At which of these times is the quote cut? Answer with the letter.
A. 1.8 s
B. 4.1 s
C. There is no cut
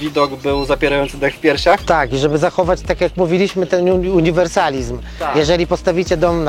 C